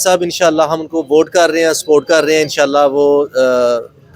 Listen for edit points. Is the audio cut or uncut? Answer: uncut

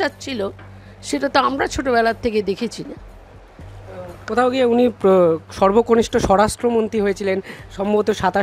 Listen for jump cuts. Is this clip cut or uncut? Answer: uncut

